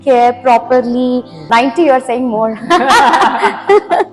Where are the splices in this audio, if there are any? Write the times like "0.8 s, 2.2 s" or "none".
1.4 s

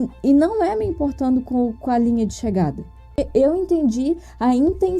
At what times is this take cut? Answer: 3.2 s

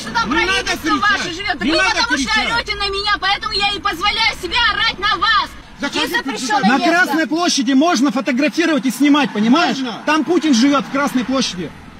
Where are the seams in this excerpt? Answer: 5.6 s

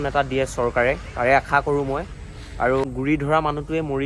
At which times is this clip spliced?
2.9 s

